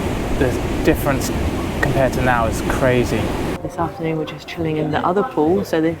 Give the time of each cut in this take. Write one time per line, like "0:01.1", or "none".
0:03.6